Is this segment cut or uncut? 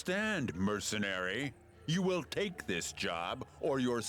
cut